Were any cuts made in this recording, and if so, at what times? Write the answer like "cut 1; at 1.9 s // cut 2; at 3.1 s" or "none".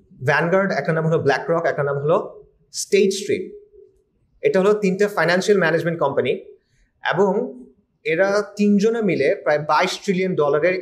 none